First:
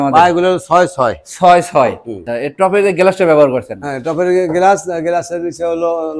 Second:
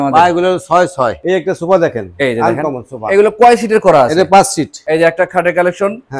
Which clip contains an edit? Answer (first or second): second